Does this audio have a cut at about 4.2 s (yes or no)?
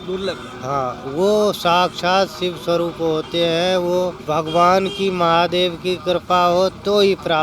yes